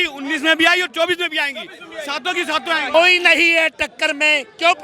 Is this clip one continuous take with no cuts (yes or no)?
no